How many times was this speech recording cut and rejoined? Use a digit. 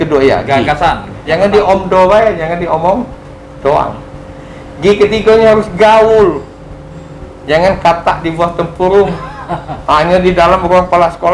1